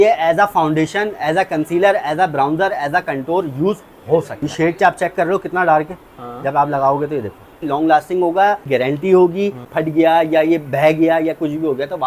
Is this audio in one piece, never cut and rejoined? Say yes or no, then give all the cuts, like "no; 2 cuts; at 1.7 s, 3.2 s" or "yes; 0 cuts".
no; 4 cuts; at 4.5 s, 7.6 s, 8.7 s, 9.7 s